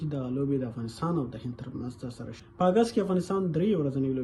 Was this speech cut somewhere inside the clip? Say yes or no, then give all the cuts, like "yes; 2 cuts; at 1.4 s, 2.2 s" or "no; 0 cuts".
yes; 1 cut; at 2.3 s